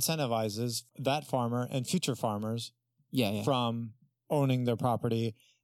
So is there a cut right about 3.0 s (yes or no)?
no